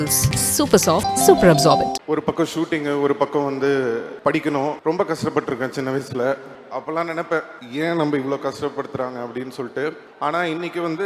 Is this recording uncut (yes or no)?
no